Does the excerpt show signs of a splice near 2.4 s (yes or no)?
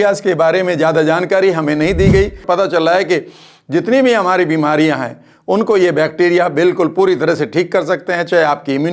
yes